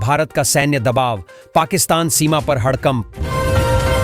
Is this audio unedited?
no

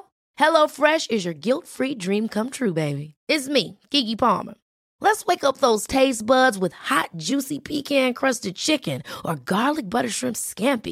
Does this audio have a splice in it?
no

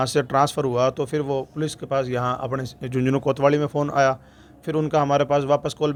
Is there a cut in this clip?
no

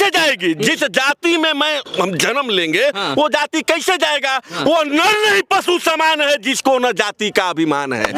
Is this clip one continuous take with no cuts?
yes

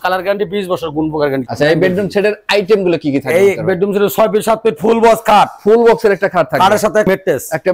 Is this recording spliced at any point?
yes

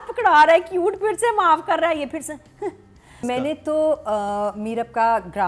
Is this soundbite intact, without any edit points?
no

